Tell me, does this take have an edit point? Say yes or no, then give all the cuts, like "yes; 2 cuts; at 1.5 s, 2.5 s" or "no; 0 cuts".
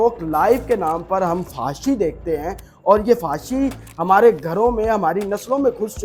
no; 0 cuts